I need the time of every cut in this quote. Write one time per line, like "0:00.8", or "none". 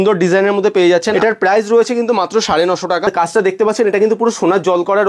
0:01.1
0:03.1